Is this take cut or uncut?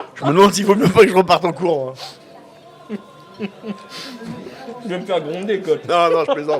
uncut